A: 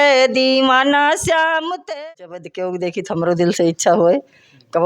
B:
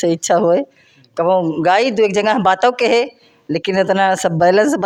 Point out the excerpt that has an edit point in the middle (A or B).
A